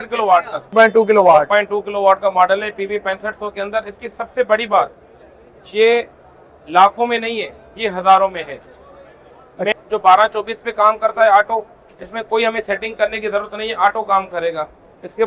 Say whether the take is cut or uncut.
cut